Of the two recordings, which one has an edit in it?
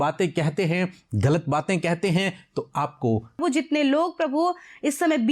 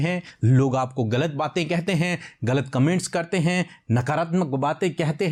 first; 1 cut; at 3.4 s

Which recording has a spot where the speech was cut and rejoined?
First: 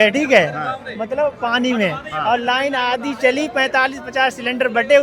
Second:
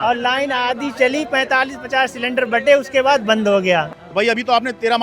second; 1 cut; at 4.0 s

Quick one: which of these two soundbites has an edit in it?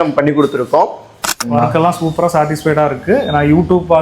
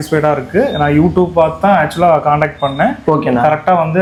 first; 1 cut; at 1.4 s

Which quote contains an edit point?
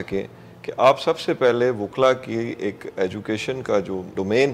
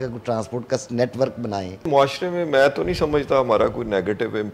second; 1 cut; at 1.9 s

